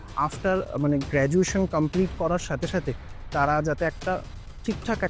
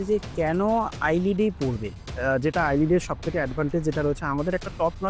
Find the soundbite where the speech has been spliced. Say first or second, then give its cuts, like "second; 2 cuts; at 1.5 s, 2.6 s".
second; 1 cut; at 2.1 s